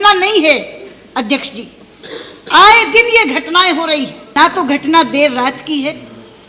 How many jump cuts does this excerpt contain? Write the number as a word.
one